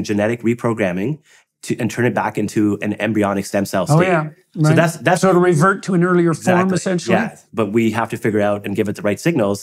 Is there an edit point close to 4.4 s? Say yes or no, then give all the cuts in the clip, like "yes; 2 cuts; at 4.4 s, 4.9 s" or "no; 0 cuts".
no; 1 cut; at 7.4 s